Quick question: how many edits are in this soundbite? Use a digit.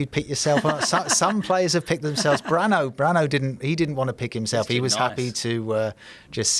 0